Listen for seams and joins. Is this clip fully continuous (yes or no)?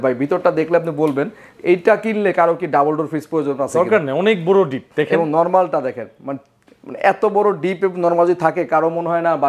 yes